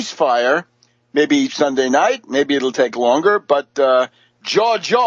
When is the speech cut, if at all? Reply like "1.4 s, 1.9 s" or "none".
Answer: none